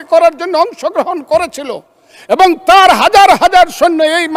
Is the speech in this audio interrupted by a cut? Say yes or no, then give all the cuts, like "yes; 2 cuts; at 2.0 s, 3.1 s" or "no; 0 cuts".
no; 0 cuts